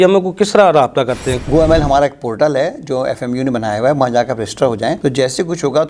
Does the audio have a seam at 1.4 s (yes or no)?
yes